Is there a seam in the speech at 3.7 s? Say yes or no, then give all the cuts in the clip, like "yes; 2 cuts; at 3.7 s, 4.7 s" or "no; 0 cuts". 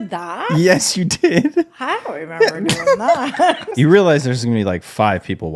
yes; 1 cut; at 3.7 s